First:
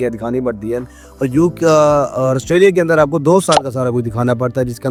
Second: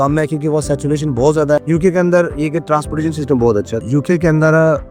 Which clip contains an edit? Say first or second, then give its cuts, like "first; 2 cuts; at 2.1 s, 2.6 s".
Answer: second; 2 cuts; at 1.6 s, 3.8 s